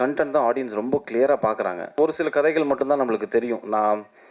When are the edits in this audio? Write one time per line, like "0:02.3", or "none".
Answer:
0:02.0

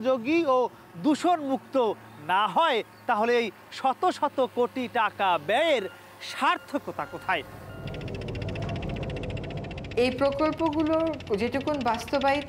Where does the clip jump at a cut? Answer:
none

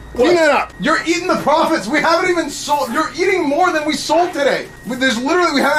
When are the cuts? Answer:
none

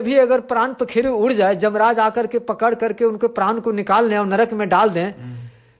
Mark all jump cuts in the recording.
none

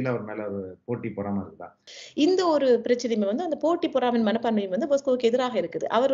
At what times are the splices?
0:01.8

